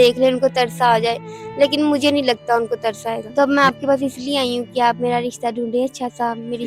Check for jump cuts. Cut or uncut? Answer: cut